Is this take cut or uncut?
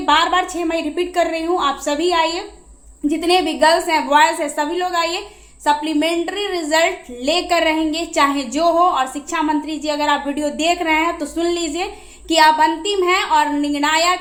uncut